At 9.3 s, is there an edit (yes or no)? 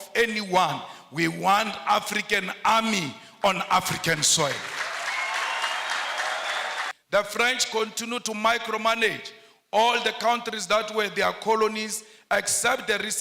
no